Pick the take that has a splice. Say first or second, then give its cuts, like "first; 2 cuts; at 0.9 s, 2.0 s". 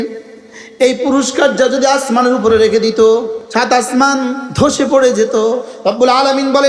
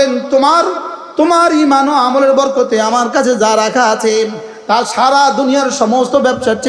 first; 3 cuts; at 3.4 s, 4.5 s, 5.7 s